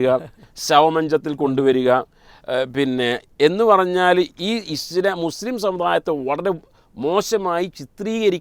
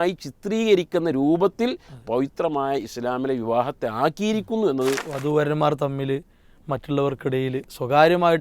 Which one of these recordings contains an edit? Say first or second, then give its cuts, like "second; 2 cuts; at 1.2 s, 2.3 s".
second; 1 cut; at 5.1 s